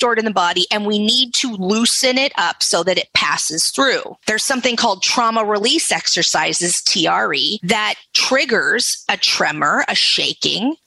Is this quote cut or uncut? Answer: cut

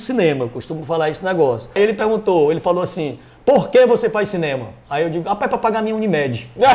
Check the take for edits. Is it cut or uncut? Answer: cut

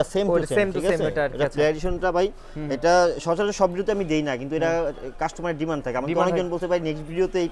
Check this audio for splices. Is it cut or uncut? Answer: uncut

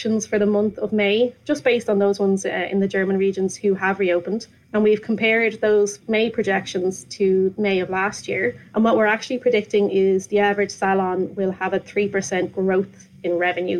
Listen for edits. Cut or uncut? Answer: cut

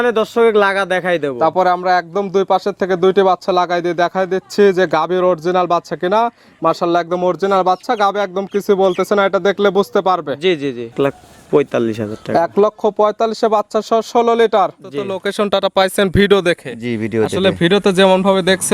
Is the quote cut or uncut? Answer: cut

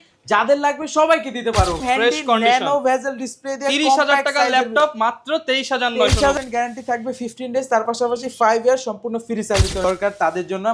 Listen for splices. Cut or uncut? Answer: cut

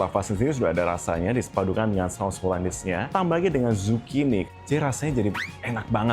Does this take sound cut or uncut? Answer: cut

